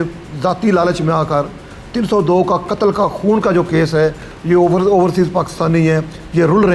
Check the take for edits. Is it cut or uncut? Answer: uncut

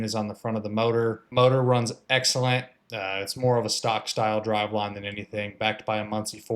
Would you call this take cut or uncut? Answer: cut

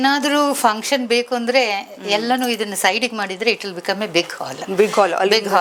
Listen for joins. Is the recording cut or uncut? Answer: uncut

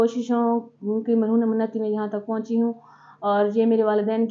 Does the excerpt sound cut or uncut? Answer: uncut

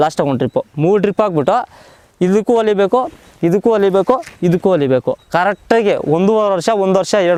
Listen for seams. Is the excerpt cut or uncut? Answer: uncut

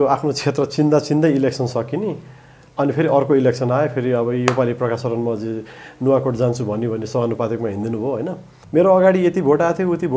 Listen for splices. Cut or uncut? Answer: cut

